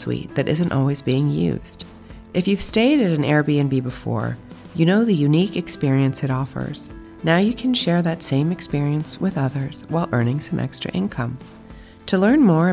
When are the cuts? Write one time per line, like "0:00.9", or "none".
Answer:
none